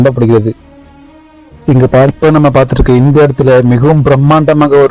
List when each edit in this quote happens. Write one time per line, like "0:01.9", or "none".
0:02.1